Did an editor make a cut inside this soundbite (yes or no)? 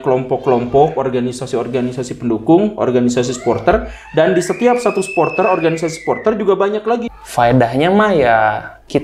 yes